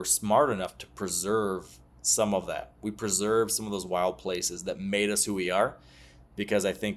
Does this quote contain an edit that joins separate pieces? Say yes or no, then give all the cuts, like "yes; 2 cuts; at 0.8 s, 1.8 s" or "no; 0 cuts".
no; 0 cuts